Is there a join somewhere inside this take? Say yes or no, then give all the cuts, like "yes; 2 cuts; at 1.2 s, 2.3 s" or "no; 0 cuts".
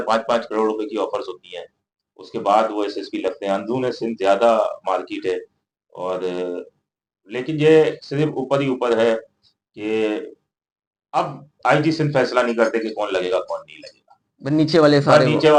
no; 0 cuts